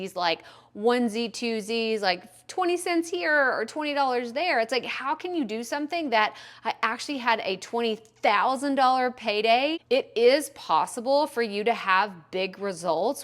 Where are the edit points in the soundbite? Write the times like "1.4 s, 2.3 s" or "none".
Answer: 9.8 s